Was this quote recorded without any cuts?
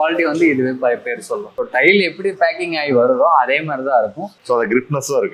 no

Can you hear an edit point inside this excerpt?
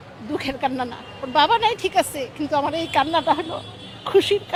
no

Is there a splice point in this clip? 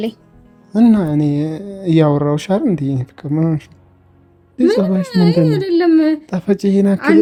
no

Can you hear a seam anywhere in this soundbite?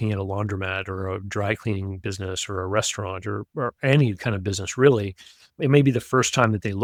no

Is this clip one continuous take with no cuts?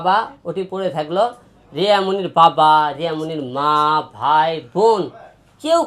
yes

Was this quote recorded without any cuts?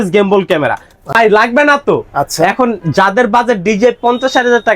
no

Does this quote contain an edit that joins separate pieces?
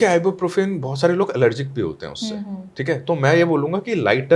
no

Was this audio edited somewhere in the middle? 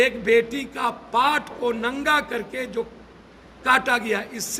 no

